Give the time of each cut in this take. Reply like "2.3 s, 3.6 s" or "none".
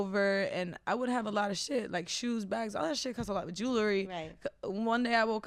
none